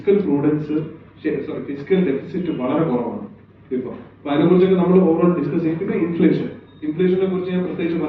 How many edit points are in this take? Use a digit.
0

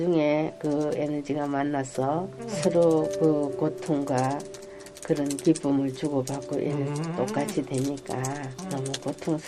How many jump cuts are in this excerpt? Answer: 2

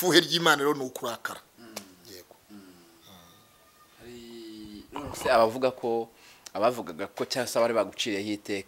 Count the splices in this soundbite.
0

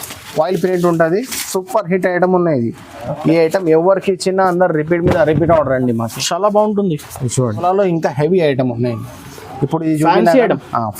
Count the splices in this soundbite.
1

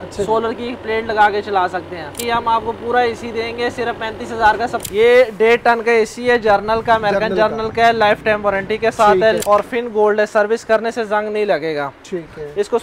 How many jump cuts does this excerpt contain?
3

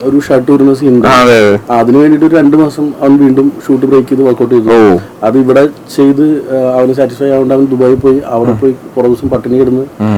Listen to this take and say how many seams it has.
0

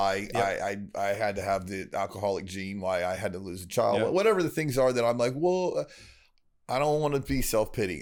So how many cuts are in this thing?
0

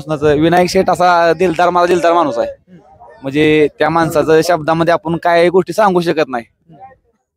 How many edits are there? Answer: 0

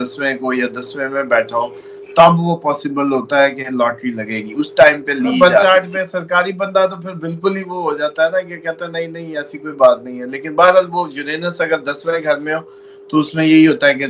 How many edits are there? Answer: 1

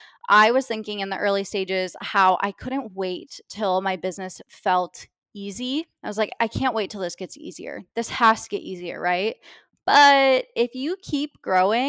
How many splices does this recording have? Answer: 1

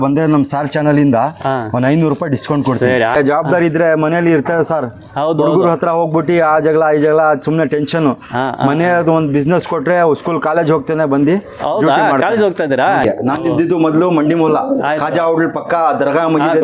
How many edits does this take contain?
2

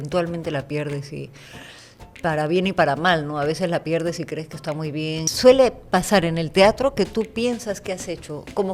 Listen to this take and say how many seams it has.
1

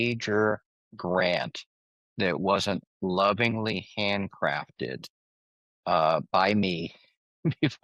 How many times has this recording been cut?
0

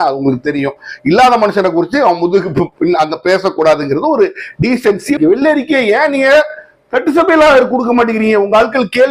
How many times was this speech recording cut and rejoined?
1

